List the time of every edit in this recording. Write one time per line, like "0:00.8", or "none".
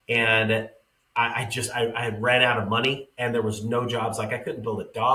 none